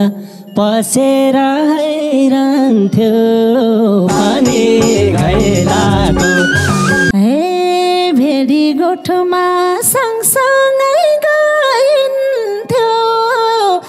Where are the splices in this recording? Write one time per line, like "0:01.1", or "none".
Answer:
0:07.1